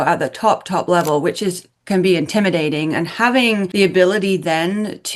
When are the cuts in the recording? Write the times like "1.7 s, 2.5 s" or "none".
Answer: none